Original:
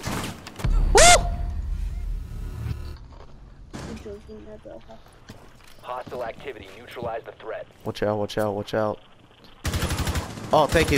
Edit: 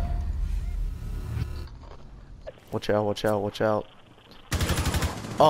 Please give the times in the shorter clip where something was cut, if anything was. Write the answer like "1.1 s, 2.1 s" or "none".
2.5 s